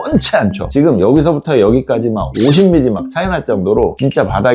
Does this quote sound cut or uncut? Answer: uncut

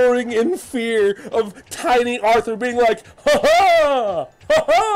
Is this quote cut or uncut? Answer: uncut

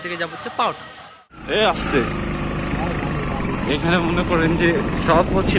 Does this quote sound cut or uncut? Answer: cut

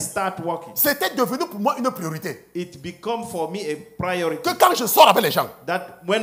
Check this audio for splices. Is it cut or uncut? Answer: uncut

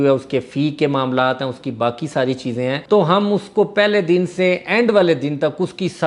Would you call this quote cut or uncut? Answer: uncut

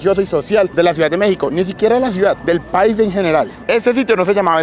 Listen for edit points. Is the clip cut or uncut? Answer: cut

